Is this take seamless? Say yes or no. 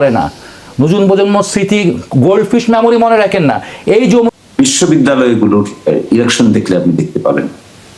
no